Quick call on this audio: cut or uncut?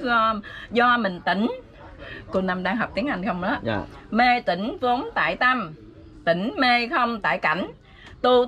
uncut